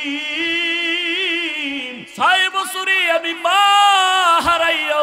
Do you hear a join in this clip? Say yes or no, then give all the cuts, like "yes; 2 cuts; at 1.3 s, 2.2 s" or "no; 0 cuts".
yes; 1 cut; at 2.0 s